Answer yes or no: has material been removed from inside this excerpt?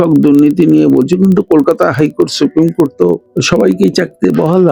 no